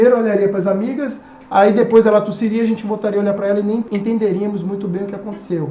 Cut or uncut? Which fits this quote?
cut